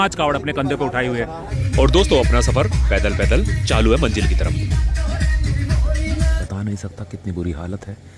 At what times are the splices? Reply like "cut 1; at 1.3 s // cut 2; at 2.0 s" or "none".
cut 1; at 1.5 s // cut 2; at 6.4 s